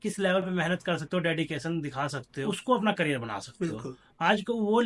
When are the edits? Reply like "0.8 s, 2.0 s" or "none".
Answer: 2.3 s